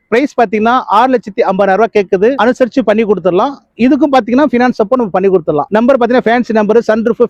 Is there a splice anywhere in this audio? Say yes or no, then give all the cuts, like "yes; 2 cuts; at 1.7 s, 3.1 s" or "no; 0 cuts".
no; 0 cuts